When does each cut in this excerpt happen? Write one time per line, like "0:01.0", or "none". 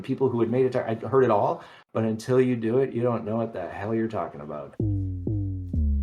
0:04.8

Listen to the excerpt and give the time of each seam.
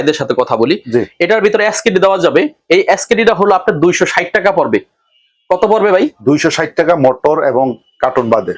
none

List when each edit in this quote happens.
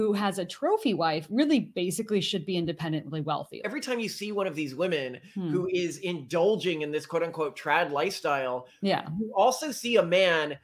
0:03.7

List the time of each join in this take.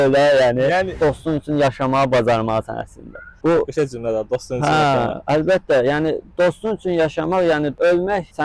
0:01.0

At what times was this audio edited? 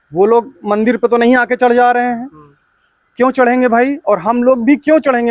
none

